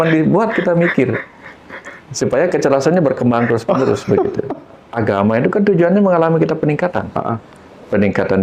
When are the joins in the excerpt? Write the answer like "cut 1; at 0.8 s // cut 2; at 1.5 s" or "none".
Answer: cut 1; at 4.9 s